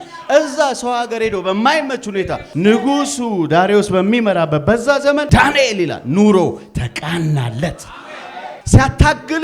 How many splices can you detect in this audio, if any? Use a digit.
3